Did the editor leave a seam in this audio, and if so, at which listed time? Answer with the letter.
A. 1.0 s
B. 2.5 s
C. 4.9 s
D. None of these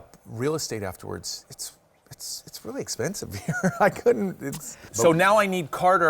C